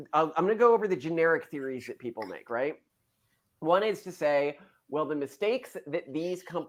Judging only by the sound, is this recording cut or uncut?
uncut